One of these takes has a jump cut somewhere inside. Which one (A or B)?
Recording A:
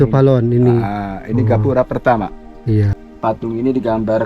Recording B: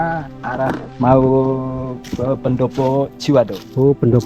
A